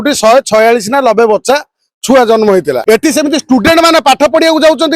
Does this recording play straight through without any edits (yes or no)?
no